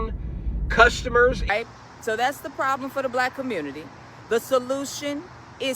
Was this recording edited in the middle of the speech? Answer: yes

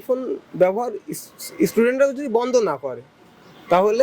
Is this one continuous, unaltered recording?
yes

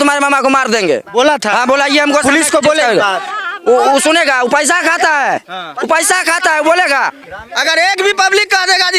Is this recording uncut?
no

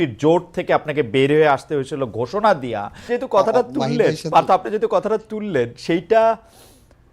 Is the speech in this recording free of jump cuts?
no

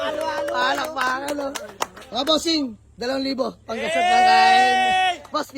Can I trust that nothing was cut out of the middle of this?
no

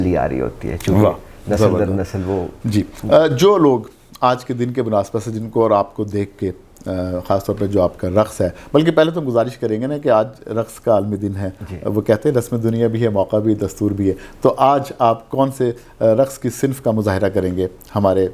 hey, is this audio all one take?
yes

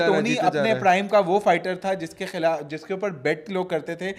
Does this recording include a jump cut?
no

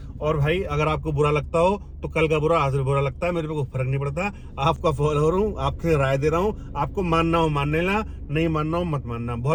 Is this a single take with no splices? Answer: yes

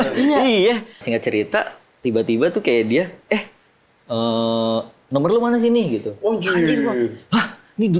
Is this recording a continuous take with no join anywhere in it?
no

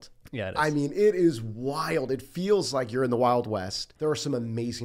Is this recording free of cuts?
no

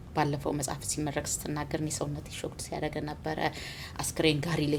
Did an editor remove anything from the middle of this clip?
no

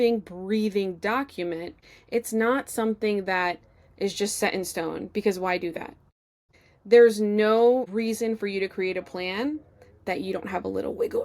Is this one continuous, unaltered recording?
no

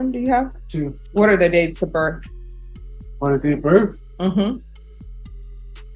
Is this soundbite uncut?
no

